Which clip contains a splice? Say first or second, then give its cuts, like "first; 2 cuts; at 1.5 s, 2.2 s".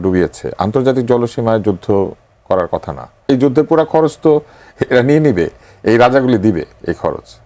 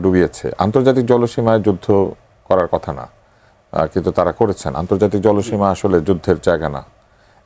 first; 1 cut; at 3.3 s